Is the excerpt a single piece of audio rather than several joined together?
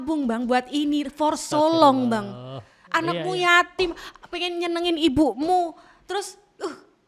yes; 0 cuts

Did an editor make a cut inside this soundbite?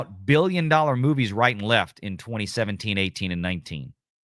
no; 0 cuts

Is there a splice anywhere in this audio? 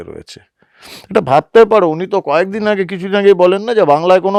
no; 0 cuts

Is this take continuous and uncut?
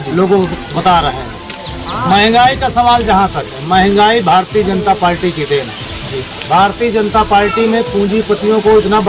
yes; 0 cuts

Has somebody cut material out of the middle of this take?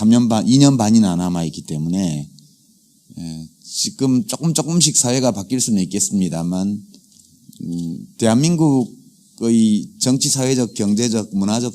yes; 1 cut; at 2.3 s

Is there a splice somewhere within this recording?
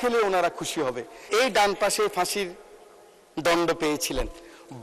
yes; 1 cut; at 1.2 s

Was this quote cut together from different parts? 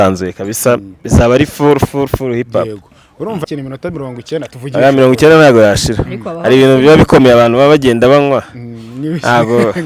yes; 1 cut; at 3.4 s

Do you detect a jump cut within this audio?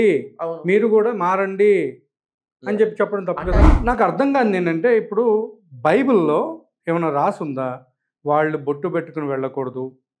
yes; 1 cut; at 3.7 s

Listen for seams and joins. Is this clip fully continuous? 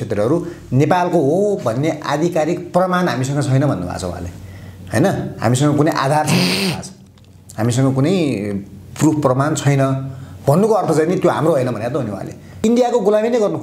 no; 1 cut; at 12.6 s

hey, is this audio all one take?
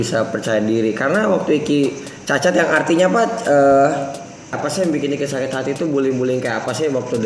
no; 1 cut; at 4.6 s

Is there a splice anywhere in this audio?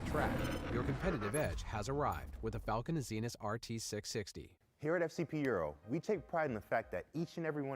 yes; 1 cut; at 4.4 s

